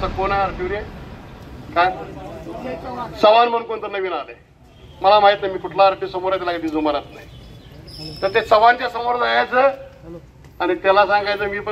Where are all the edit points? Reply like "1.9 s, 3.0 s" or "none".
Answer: none